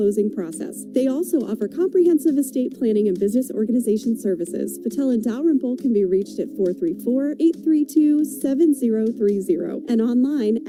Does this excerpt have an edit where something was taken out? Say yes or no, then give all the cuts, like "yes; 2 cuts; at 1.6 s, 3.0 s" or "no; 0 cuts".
no; 0 cuts